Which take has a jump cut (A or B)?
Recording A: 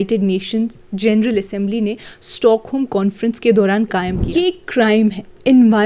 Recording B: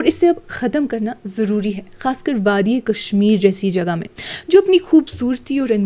A